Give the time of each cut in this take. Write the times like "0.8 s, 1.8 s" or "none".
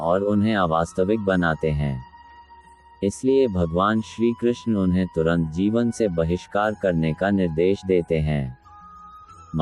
none